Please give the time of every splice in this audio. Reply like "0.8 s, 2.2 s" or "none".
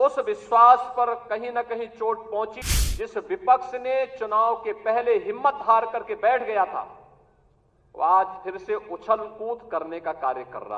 2.6 s